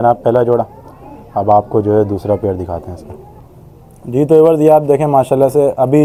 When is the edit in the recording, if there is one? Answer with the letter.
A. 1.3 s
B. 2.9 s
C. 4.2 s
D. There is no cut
D